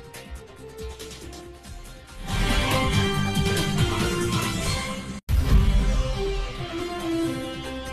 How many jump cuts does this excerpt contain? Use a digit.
2